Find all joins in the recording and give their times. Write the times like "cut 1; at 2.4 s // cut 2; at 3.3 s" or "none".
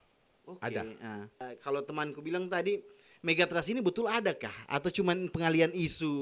cut 1; at 1.5 s